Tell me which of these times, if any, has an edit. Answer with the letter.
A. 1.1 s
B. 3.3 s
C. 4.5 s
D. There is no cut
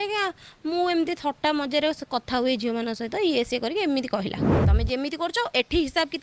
C